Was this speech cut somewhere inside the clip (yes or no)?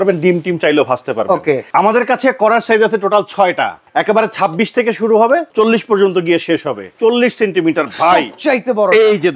yes